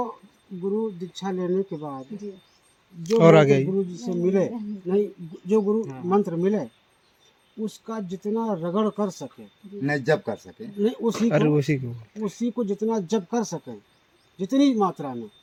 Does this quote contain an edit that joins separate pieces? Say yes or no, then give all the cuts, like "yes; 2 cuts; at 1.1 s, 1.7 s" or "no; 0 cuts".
no; 0 cuts